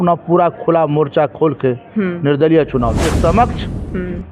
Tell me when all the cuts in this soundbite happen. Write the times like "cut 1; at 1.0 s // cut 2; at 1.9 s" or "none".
cut 1; at 3.1 s